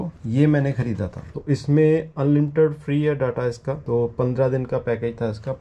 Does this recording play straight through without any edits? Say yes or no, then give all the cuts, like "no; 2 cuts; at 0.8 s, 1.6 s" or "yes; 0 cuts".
yes; 0 cuts